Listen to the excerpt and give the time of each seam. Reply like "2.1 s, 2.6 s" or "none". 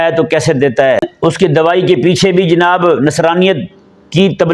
1.1 s